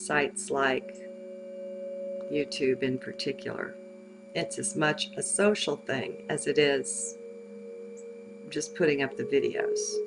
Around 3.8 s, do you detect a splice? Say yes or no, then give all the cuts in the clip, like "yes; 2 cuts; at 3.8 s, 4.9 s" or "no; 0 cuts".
yes; 1 cut; at 3.8 s